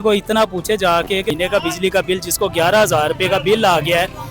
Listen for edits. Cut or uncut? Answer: cut